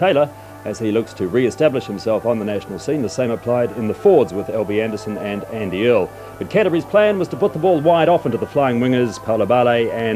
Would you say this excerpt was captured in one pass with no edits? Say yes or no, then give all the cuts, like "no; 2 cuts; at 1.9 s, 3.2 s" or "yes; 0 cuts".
yes; 0 cuts